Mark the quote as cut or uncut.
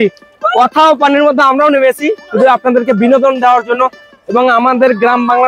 uncut